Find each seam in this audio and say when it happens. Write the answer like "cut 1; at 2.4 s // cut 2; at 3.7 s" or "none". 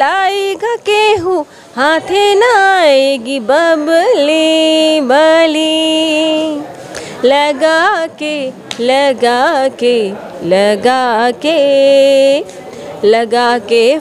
none